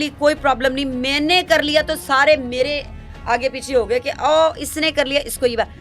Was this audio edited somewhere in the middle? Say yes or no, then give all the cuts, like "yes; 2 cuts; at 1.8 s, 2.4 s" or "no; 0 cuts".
no; 0 cuts